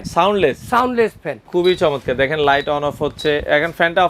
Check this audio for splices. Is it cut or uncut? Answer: cut